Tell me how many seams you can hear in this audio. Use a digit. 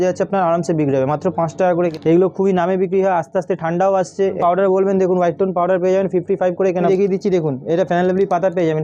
3